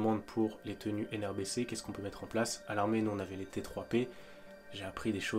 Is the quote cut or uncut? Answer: uncut